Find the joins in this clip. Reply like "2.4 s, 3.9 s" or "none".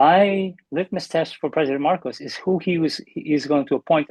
none